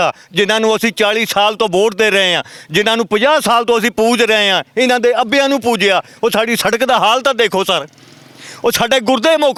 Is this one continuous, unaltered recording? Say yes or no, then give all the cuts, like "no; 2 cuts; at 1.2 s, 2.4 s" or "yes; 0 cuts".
yes; 0 cuts